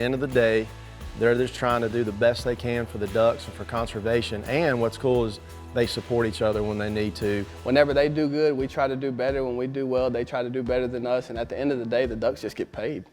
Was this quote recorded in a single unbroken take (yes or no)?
no